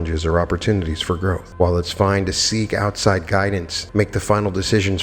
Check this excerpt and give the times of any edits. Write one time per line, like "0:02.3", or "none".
0:01.5
0:03.8